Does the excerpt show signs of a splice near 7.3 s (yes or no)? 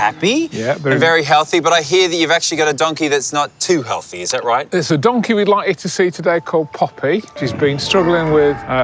yes